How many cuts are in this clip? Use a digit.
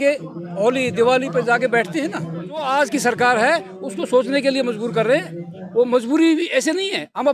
1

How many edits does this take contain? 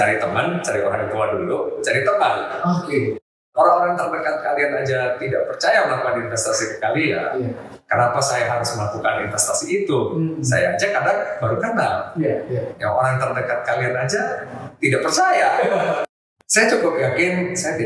2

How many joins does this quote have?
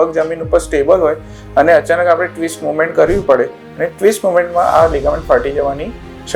0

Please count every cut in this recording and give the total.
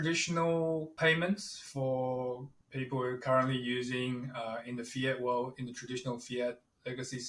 2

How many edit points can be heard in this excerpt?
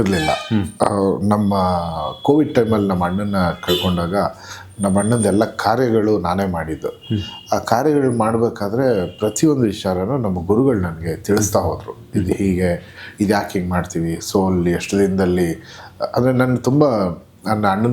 0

